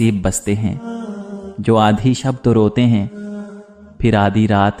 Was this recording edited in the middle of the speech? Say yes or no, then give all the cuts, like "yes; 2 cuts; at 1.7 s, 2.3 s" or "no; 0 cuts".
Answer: no; 0 cuts